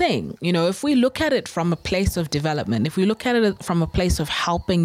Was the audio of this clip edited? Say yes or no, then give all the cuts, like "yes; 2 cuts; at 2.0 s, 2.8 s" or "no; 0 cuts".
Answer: no; 0 cuts